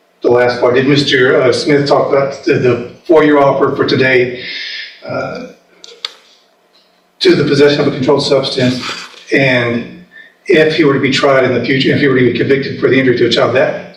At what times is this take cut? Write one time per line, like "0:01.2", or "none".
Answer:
none